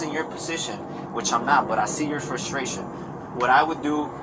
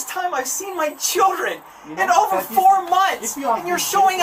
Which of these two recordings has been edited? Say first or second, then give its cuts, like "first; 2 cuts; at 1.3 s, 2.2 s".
first; 1 cut; at 3.0 s